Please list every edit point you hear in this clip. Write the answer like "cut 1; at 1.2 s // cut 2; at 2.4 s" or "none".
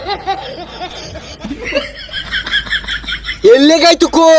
cut 1; at 1.3 s // cut 2; at 3.4 s